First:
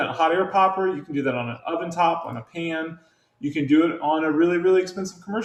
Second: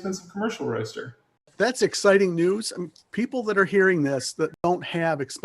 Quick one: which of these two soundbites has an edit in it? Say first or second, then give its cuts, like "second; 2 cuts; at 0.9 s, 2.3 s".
second; 2 cuts; at 1.5 s, 4.5 s